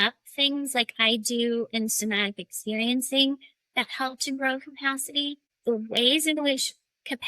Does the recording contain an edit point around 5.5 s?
yes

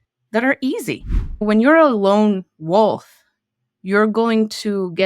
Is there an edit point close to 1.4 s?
yes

